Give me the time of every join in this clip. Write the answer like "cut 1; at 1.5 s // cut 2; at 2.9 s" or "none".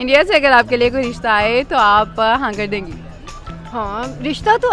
none